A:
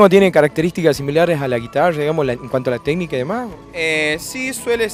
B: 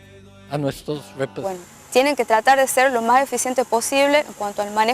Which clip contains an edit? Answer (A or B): B